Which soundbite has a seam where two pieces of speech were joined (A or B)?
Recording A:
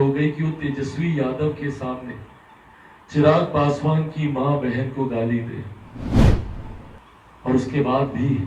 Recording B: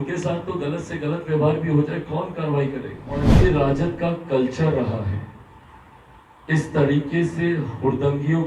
B